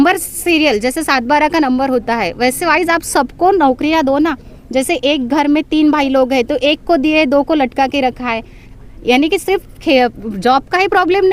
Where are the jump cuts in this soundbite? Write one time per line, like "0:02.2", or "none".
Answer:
none